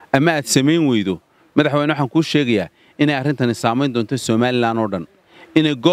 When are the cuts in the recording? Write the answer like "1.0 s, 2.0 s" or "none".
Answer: none